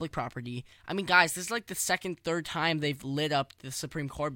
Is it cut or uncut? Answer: uncut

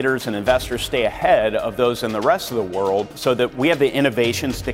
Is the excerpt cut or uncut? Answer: cut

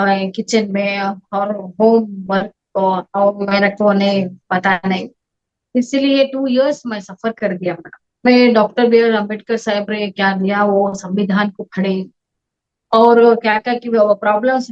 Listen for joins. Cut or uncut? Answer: cut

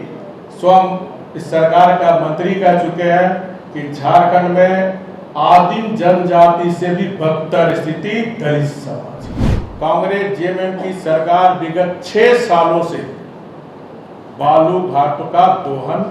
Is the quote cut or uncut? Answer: cut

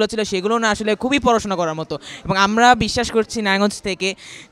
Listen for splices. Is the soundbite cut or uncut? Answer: uncut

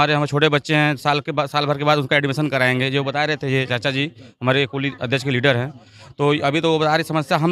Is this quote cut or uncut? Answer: uncut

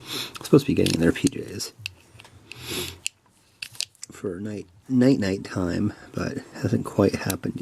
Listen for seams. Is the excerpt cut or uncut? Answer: uncut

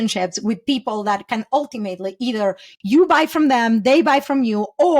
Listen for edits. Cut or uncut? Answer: uncut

